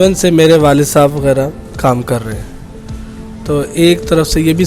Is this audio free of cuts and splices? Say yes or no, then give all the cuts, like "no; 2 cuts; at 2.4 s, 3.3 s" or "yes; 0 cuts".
no; 1 cut; at 1.6 s